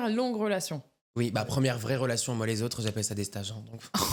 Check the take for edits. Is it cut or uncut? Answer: uncut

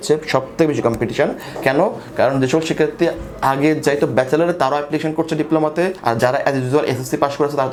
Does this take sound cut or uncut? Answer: uncut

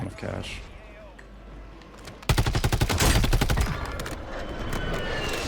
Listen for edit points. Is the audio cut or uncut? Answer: uncut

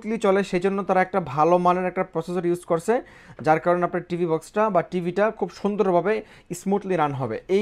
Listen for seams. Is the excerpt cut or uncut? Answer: uncut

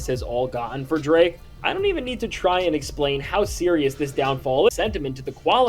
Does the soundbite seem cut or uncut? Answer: cut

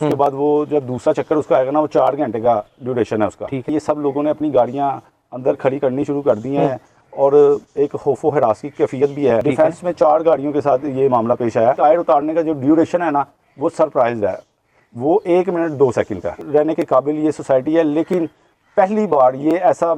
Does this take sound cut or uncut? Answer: cut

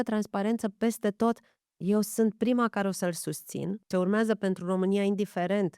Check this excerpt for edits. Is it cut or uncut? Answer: cut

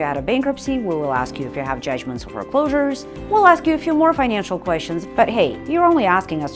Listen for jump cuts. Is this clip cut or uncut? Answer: cut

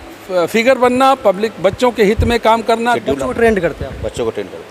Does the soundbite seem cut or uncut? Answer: cut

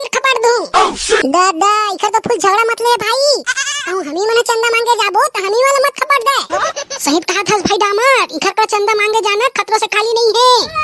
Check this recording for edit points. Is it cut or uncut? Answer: uncut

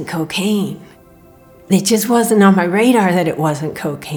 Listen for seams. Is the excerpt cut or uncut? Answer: uncut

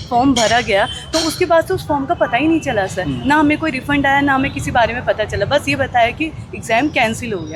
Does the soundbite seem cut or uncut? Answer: uncut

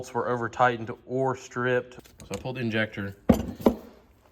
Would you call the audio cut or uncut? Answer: cut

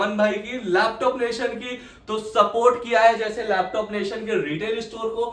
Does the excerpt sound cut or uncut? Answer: uncut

